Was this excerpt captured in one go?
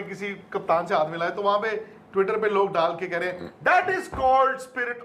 yes; 0 cuts

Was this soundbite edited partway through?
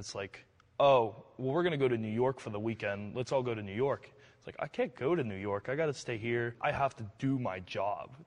no; 0 cuts

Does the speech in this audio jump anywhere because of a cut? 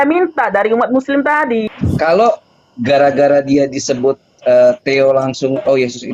yes; 1 cut; at 1.7 s

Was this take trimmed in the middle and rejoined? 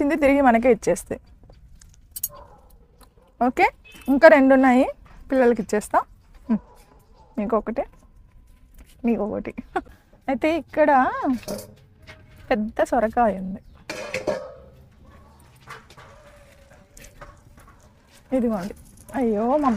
yes; 1 cut; at 9.9 s

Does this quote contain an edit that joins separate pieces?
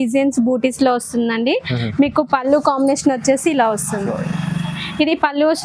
no; 0 cuts

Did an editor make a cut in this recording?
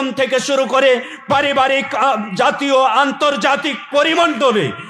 no; 0 cuts

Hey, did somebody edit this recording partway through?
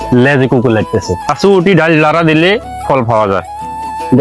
yes; 1 cut; at 1.3 s

